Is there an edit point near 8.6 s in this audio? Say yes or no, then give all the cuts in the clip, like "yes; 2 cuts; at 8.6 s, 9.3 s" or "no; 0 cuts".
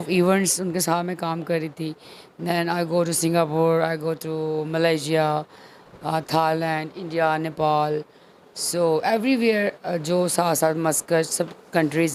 no; 0 cuts